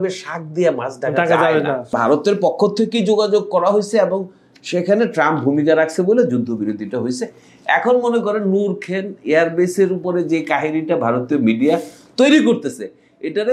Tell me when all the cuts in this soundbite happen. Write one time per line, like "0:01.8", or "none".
0:01.9